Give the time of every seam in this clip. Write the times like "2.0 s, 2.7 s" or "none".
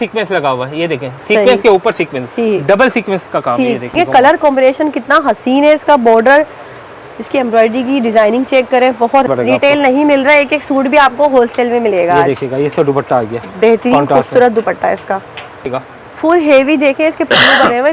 3.9 s, 9.3 s, 15.6 s